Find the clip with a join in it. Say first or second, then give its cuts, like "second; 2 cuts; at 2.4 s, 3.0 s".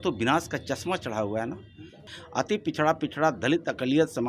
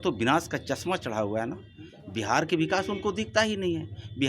first; 1 cut; at 2.1 s